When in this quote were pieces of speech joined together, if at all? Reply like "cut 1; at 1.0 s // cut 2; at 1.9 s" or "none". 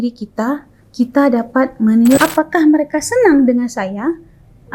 cut 1; at 2.2 s